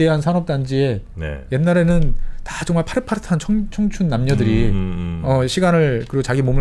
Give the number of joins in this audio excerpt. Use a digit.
0